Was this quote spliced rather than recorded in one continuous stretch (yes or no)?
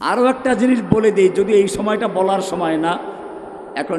no